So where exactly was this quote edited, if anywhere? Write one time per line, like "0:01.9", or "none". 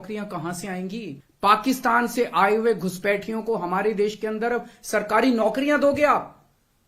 0:01.2